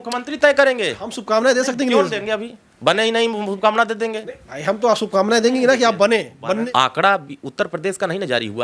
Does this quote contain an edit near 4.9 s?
no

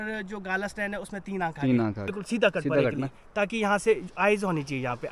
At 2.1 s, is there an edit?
yes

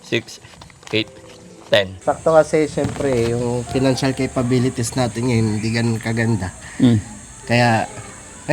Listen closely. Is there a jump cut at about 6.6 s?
no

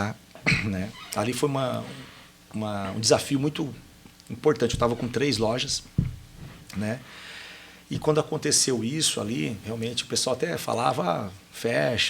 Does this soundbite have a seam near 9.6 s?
yes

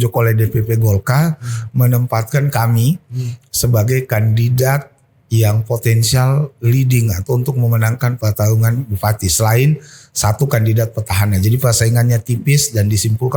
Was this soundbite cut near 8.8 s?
no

